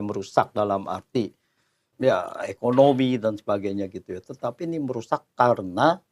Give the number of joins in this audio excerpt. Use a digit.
1